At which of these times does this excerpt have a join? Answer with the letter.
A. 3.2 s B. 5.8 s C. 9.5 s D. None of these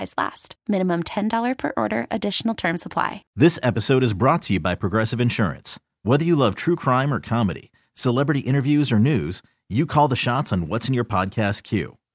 A